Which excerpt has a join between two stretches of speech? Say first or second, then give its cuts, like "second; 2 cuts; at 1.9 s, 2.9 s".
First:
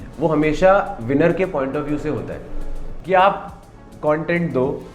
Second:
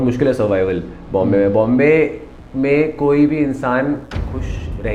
first; 1 cut; at 2.9 s